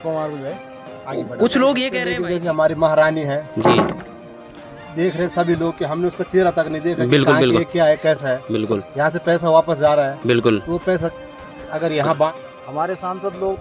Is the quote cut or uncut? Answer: cut